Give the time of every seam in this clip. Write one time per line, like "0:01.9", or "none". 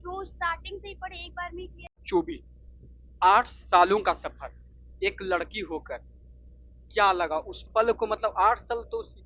0:02.0